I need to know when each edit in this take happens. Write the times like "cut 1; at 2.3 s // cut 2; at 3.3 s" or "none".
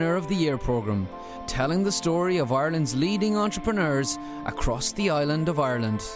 none